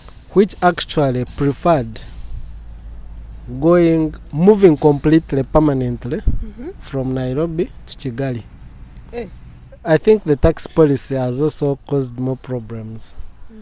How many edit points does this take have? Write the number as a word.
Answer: one